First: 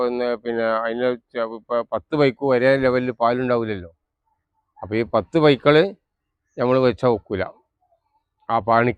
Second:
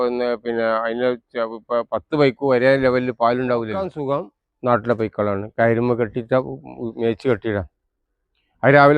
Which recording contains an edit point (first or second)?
second